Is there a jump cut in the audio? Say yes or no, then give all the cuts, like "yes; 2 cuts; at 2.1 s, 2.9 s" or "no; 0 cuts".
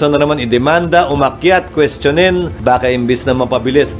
yes; 1 cut; at 2.5 s